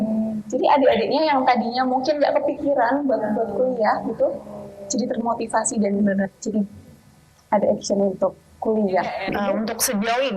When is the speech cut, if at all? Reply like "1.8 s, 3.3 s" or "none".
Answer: 9.3 s